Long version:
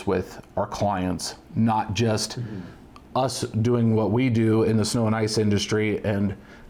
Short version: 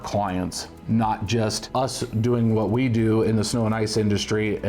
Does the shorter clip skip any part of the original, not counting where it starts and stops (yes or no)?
yes